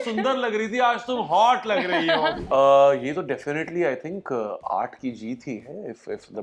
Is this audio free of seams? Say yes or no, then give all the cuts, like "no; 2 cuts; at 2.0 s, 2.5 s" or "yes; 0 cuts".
no; 1 cut; at 2.4 s